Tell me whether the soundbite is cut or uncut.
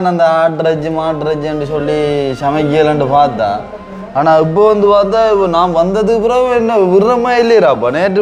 uncut